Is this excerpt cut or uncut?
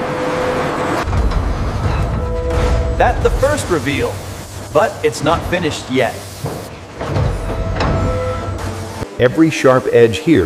uncut